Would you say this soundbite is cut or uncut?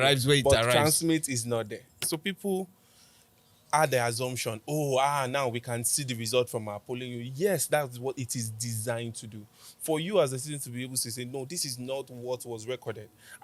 cut